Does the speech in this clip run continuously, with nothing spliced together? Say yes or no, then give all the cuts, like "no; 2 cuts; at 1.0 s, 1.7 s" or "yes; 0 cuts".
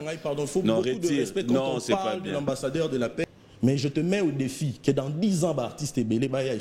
no; 1 cut; at 3.2 s